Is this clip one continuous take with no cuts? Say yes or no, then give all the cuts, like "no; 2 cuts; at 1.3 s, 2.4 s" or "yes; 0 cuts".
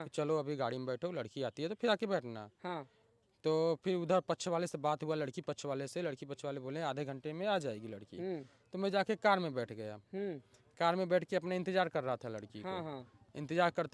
yes; 0 cuts